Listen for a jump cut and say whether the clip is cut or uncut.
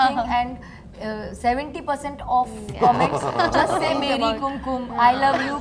uncut